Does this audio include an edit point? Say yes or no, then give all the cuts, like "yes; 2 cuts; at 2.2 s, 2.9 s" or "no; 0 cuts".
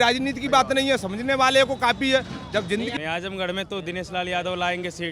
yes; 1 cut; at 2.9 s